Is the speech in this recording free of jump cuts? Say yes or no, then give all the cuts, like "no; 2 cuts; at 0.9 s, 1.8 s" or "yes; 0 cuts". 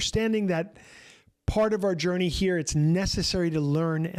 yes; 0 cuts